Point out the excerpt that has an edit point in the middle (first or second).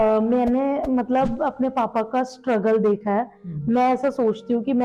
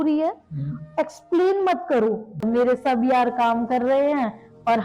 second